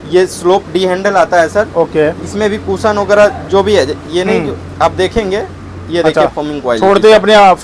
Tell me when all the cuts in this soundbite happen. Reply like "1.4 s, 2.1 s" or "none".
none